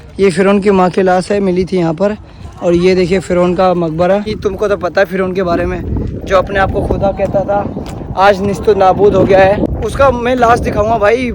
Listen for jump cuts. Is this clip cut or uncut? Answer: cut